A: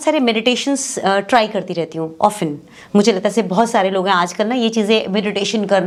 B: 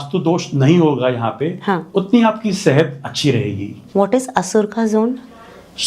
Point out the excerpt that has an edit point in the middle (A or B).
B